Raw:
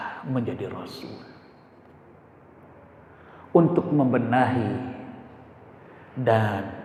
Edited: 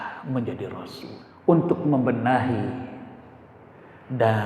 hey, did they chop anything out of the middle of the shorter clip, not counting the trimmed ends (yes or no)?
yes